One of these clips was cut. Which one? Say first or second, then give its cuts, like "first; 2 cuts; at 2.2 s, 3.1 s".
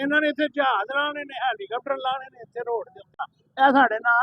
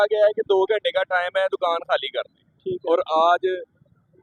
first; 1 cut; at 3.2 s